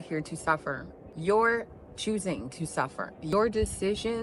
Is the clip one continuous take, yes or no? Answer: yes